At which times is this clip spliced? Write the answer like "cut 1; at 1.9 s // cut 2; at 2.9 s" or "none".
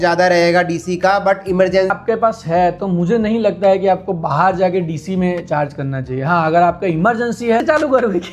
cut 1; at 2.0 s // cut 2; at 7.6 s